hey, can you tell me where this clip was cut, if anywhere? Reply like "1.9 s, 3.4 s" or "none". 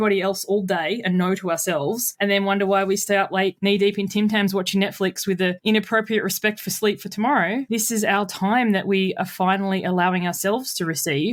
none